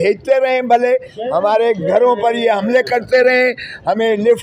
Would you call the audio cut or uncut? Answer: uncut